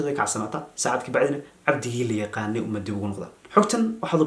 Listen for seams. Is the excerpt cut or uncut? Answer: cut